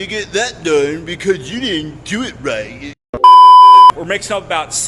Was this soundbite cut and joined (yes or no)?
yes